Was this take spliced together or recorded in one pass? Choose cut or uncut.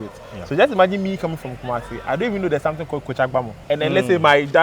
cut